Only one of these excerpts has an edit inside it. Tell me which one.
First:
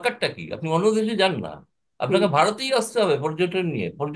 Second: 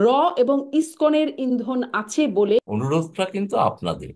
second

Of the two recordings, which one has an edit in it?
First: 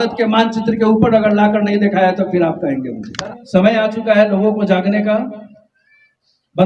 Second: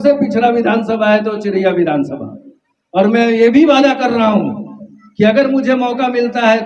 first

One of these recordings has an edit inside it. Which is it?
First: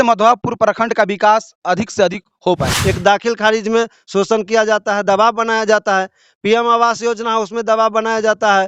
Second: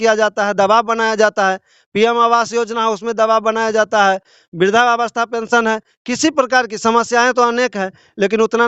first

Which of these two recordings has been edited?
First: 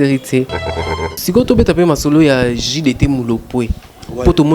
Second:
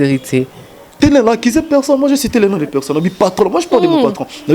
first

